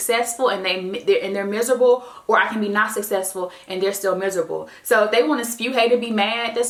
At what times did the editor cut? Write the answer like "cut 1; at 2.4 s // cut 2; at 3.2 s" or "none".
none